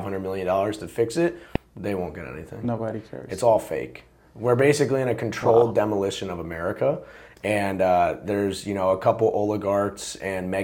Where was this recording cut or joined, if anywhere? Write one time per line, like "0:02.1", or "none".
none